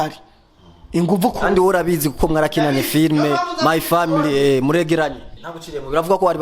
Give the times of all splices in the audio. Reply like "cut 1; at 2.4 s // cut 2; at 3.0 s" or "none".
cut 1; at 5.2 s